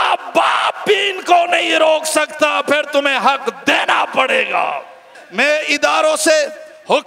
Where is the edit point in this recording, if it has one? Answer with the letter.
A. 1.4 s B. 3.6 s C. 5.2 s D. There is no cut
C